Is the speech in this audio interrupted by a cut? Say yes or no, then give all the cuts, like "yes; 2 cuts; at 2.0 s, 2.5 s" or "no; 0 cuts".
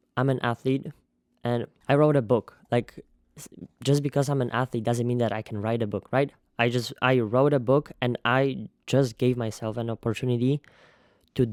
no; 0 cuts